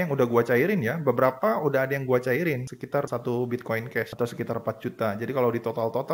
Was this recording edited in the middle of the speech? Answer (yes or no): no